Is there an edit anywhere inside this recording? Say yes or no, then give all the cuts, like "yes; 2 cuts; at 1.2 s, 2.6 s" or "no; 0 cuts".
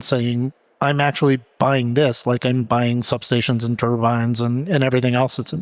no; 0 cuts